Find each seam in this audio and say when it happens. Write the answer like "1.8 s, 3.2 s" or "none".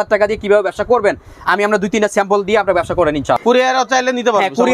none